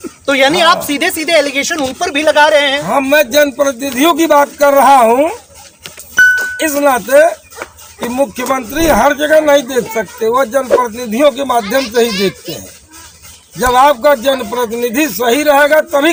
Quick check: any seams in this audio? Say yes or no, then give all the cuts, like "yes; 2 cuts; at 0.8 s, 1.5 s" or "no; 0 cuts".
no; 0 cuts